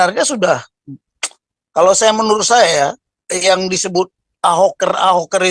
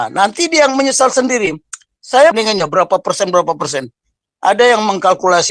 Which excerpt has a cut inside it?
second; 1 cut; at 2.3 s

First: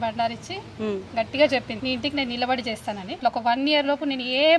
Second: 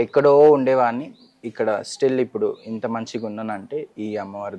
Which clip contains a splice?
first; 2 cuts; at 1.7 s, 3.2 s

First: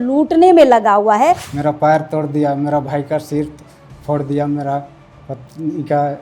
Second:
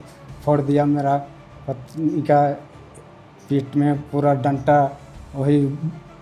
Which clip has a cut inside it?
first; 1 cut; at 1.5 s

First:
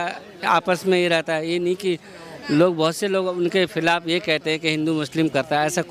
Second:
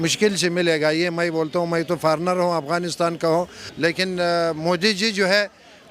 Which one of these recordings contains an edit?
second; 1 cut; at 3.6 s

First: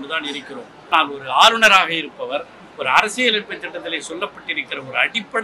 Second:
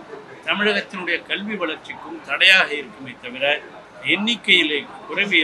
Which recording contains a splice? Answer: first; 1 cut; at 0.9 s

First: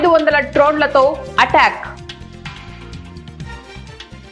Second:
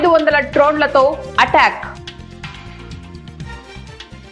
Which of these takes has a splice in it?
first; 1 cut; at 1.9 s

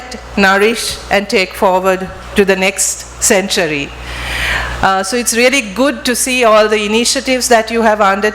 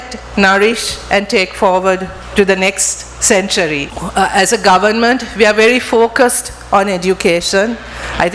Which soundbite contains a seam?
second; 1 cut; at 3.9 s

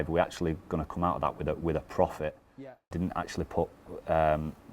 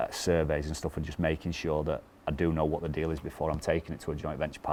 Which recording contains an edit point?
first; 1 cut; at 2.8 s

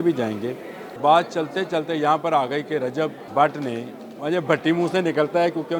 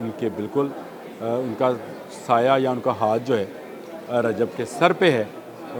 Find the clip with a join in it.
first; 2 cuts; at 1.0 s, 3.2 s

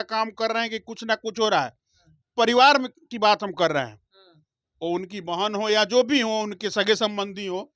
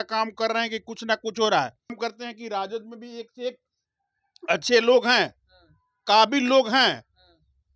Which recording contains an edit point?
second; 1 cut; at 2.0 s

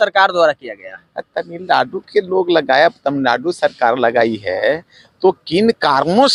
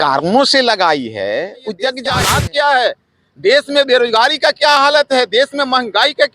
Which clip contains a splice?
second; 1 cut; at 2.1 s

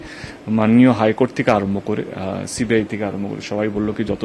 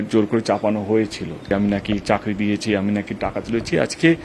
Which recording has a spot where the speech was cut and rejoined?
second; 1 cut; at 1.5 s

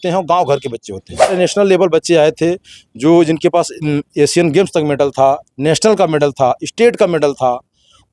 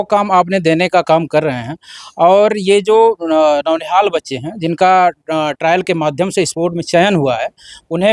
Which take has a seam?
first; 1 cut; at 1.4 s

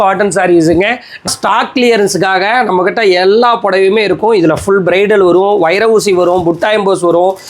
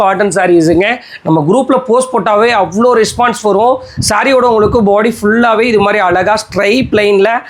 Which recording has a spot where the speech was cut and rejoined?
first; 1 cut; at 1.3 s

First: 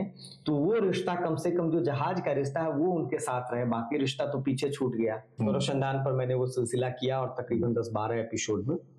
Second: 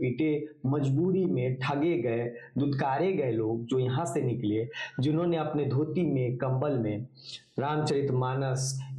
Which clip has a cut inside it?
first; 1 cut; at 5.3 s

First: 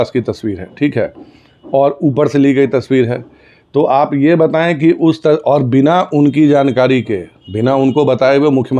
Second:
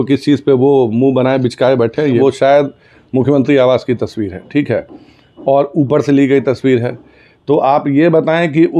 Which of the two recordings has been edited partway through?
second; 1 cut; at 2.2 s

